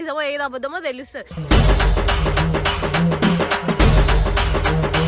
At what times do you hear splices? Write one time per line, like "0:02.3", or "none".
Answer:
none